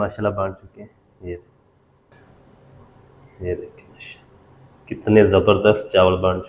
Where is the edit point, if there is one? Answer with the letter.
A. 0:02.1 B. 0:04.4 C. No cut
A